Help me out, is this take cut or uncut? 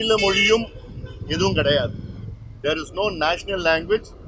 uncut